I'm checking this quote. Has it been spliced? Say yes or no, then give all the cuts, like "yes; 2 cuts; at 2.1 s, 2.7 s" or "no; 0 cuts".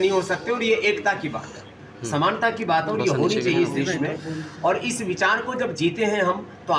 no; 0 cuts